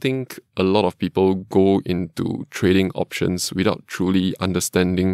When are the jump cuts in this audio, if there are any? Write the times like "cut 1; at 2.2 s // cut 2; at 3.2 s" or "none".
none